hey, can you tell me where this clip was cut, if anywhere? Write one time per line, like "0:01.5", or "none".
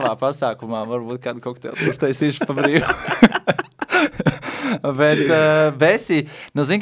none